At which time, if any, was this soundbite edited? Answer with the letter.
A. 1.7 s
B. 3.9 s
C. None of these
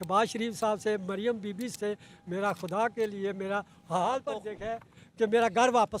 A